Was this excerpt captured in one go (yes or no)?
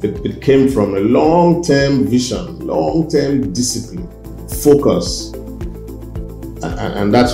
yes